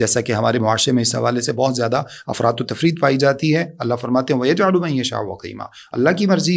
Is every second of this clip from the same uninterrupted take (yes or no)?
yes